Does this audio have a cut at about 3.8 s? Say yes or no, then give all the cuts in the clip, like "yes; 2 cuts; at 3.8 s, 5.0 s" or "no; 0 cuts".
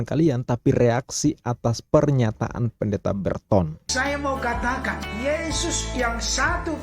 yes; 1 cut; at 3.8 s